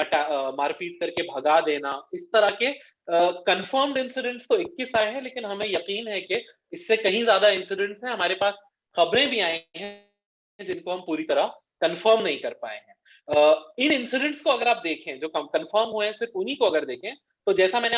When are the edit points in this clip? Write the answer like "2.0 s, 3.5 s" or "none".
none